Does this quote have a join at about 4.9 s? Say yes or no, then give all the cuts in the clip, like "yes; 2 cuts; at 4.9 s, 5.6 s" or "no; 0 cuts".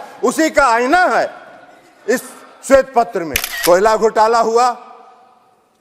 no; 1 cut; at 3.4 s